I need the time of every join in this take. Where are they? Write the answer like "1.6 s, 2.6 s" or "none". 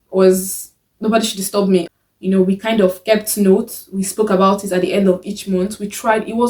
1.9 s